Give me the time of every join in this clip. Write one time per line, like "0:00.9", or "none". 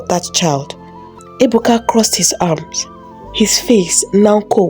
0:01.2